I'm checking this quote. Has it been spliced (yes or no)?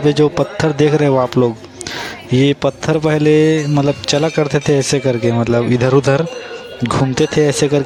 no